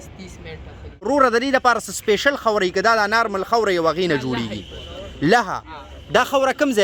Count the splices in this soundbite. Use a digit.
1